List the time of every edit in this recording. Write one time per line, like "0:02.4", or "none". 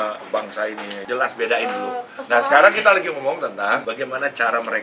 0:01.0
0:03.8